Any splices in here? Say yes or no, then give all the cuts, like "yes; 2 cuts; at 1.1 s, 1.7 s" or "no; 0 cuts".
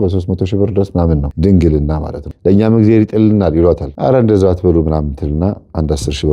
yes; 2 cuts; at 2.3 s, 3.9 s